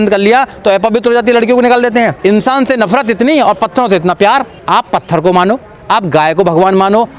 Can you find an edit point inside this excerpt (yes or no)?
yes